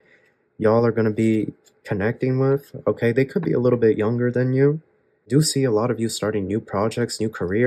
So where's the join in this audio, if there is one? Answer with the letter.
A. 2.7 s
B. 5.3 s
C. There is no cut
B